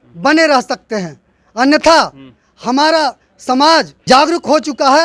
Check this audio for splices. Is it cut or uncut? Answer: cut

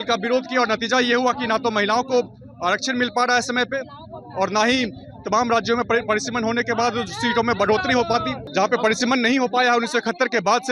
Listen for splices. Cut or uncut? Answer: cut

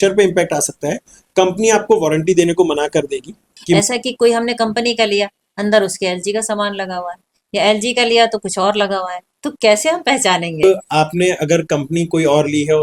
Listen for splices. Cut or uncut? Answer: cut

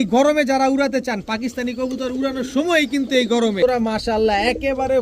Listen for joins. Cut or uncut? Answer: cut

